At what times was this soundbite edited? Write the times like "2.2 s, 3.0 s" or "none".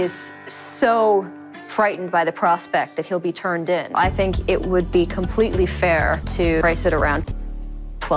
3.9 s, 6.5 s